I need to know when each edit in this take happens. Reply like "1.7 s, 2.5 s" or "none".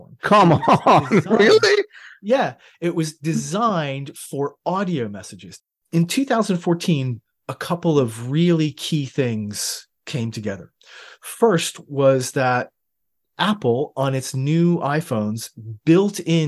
5.7 s